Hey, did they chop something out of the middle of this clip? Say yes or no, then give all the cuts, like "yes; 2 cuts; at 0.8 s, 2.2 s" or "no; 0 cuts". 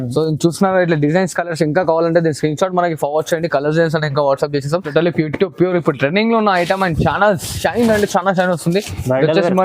yes; 1 cut; at 4.8 s